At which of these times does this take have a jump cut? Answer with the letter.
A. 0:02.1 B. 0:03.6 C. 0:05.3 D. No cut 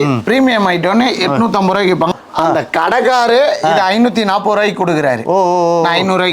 A